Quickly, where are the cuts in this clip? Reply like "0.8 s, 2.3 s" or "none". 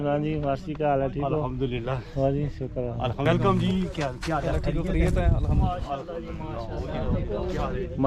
3.3 s